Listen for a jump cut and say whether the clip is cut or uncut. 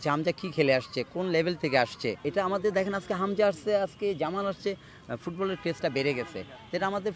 cut